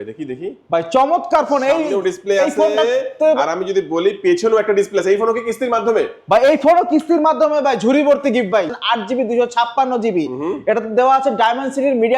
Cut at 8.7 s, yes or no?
yes